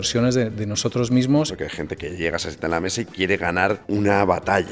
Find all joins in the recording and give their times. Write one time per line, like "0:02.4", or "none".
0:01.5
0:03.8